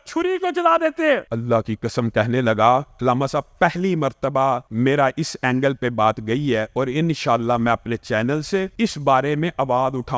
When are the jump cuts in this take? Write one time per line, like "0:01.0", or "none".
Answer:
0:01.3
0:02.9
0:04.7
0:08.7